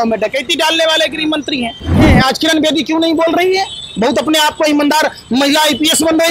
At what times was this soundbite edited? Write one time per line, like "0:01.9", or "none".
0:02.0

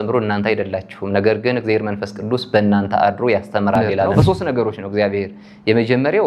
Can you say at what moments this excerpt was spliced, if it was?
0:04.1

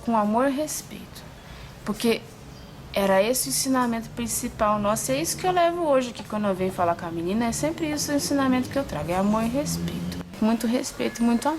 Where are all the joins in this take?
0:10.4

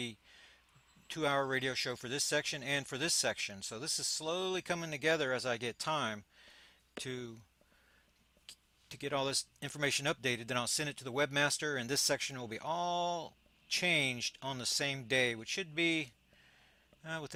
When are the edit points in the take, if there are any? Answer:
none

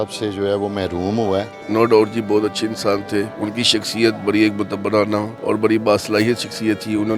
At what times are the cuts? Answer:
0:01.5
0:03.3
0:05.3

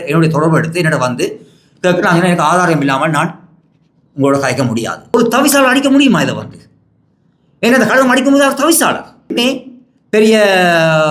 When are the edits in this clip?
0:05.1
0:09.3

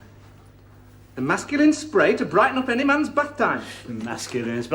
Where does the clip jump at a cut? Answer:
none

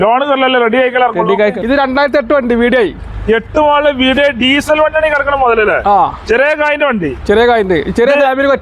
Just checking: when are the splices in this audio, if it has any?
0:01.6

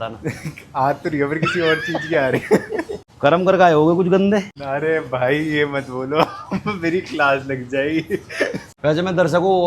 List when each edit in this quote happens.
0:03.0
0:04.6
0:08.6

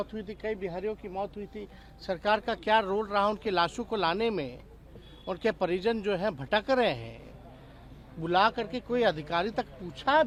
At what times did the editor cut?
none

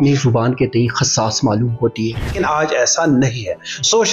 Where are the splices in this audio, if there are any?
0:02.3

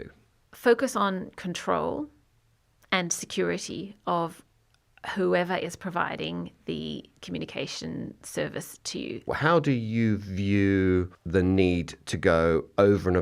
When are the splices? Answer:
0:09.3
0:11.2

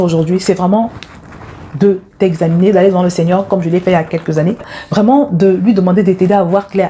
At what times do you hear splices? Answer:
0:04.7

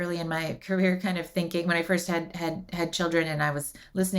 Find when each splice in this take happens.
none

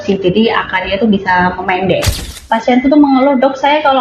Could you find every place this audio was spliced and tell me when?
0:02.4

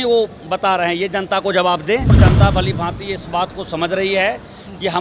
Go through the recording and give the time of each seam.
0:02.1

